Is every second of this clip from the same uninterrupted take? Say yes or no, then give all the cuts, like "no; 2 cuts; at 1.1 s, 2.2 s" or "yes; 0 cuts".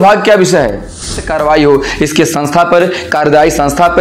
no; 1 cut; at 1.2 s